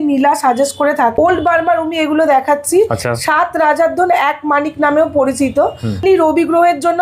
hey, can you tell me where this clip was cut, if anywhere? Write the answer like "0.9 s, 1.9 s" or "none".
1.1 s, 6.0 s